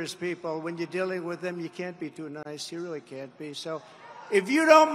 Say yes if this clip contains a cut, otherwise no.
no